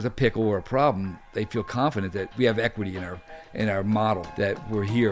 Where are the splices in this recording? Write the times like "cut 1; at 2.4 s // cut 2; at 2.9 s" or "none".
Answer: cut 1; at 2.3 s // cut 2; at 4.3 s